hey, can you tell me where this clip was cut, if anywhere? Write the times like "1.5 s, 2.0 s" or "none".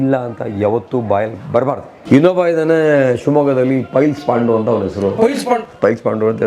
1.9 s